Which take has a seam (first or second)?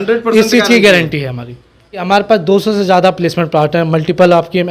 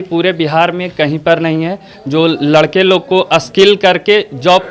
first